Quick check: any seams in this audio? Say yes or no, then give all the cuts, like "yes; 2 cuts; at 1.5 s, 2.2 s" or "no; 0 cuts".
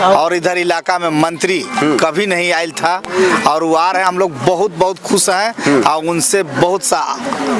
no; 0 cuts